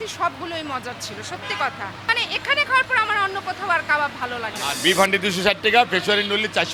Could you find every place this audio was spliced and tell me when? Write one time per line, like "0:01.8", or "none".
0:02.0
0:04.8